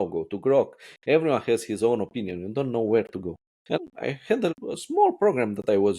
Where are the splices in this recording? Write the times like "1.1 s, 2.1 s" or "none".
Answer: 3.8 s, 4.6 s